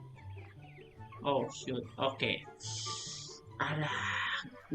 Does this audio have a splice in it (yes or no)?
yes